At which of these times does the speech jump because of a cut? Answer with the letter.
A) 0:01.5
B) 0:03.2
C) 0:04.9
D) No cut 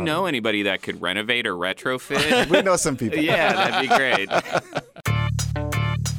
C